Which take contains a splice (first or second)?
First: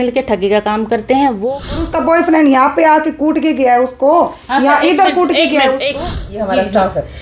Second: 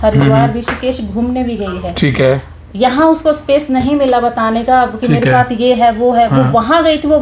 first